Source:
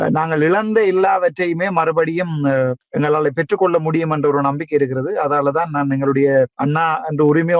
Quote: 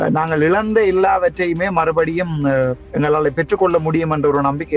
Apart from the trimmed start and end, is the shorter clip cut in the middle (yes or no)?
no